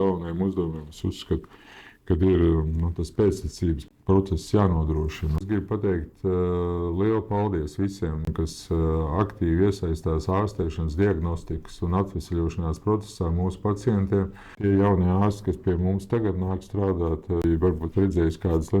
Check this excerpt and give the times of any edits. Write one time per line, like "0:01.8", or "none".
0:05.4
0:14.6
0:17.4